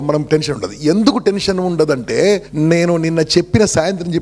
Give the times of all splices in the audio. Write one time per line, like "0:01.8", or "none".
0:02.5